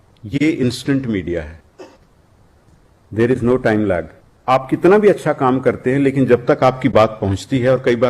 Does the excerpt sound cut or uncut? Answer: cut